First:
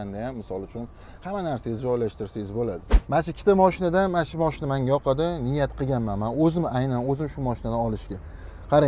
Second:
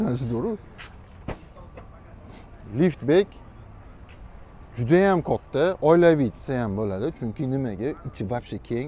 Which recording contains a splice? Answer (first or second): first